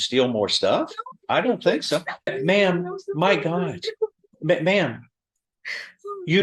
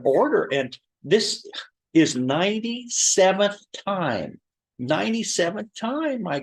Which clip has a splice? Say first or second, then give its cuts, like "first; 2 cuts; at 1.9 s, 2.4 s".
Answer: first; 1 cut; at 2.3 s